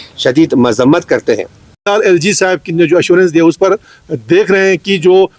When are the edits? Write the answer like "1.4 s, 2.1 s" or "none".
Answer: 1.9 s